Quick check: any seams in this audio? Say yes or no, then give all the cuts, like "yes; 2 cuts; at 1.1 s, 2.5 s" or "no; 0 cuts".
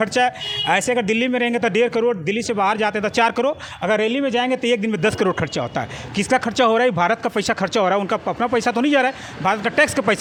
no; 0 cuts